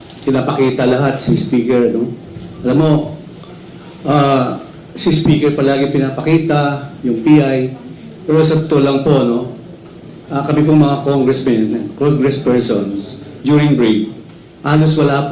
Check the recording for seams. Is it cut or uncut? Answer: uncut